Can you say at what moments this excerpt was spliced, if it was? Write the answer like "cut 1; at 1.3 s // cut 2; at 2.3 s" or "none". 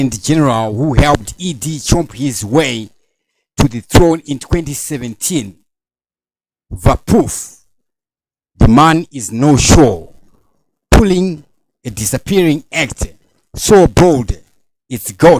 cut 1; at 4.4 s